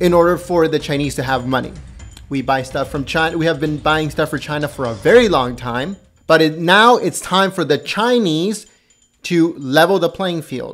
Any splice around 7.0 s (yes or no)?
no